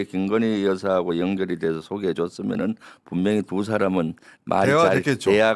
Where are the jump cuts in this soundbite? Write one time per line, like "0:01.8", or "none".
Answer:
none